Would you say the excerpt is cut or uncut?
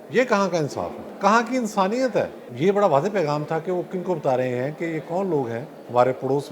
cut